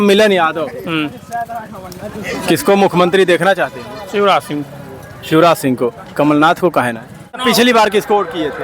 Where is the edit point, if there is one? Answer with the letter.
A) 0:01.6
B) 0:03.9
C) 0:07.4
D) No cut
C